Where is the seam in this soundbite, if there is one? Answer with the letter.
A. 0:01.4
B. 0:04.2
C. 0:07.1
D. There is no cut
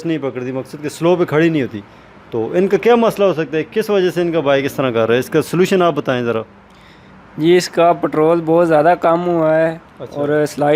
D